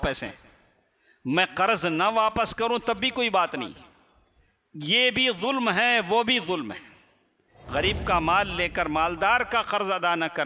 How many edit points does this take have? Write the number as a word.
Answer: one